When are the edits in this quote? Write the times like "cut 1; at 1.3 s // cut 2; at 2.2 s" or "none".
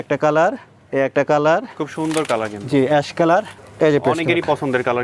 cut 1; at 3.5 s

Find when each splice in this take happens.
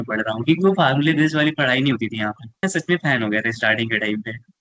cut 1; at 2.6 s

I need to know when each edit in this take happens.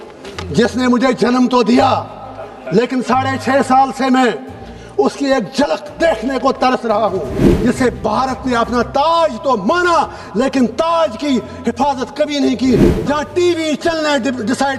cut 1; at 7.5 s // cut 2; at 12.9 s

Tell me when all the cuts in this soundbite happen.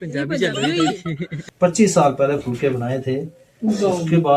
cut 1; at 1.3 s

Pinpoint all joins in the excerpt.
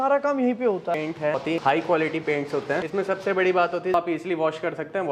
cut 1; at 1.4 s // cut 2; at 2.8 s // cut 3; at 3.9 s

